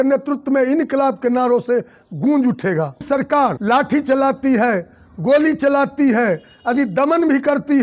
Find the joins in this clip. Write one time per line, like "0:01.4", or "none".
0:03.2